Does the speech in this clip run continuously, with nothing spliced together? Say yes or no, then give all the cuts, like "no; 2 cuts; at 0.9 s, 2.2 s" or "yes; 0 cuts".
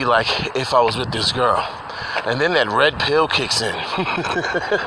yes; 0 cuts